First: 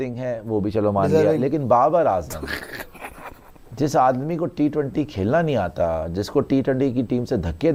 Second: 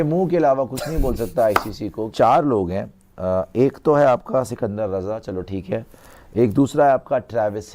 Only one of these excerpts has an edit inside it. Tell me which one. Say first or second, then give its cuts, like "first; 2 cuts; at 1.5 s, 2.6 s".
second; 1 cut; at 2.1 s